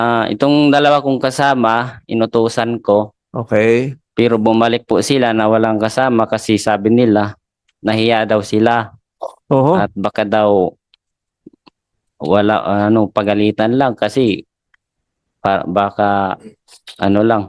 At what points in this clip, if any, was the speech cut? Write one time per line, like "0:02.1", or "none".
none